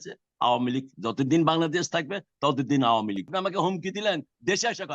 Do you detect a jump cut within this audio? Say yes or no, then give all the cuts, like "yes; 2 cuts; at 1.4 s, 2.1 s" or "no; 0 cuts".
yes; 1 cut; at 3.3 s